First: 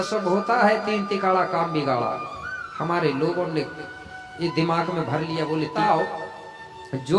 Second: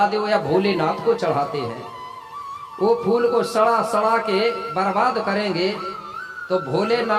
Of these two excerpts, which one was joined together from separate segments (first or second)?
first